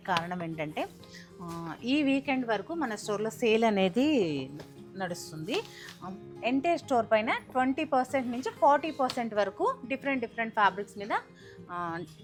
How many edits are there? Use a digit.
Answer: 0